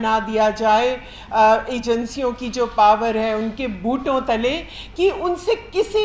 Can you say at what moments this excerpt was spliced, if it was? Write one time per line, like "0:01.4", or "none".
none

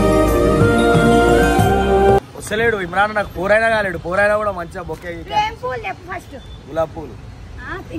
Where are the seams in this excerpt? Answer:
0:02.4

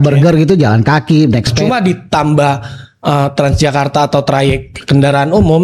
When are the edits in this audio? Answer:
0:01.5

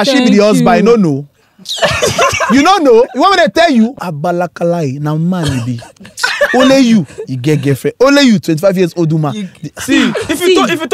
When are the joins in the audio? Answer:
0:04.0

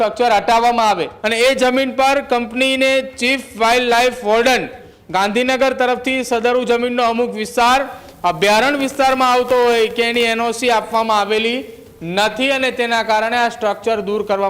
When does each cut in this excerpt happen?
0:01.1

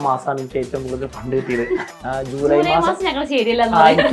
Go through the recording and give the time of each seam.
0:02.0

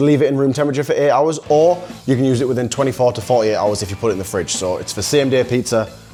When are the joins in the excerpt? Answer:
none

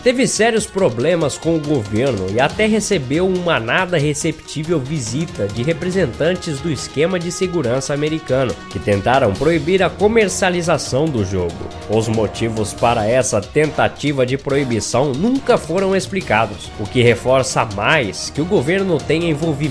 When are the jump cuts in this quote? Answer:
none

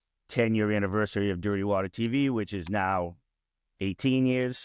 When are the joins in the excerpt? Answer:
none

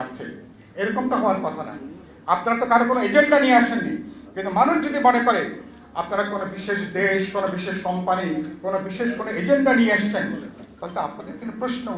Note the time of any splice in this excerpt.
none

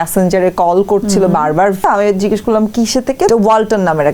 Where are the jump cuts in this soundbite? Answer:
0:01.8
0:03.3

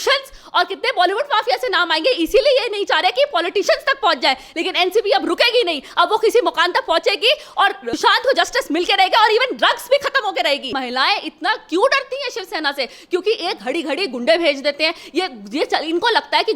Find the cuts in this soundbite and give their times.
0:10.7

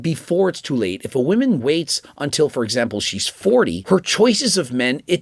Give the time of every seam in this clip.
0:03.8

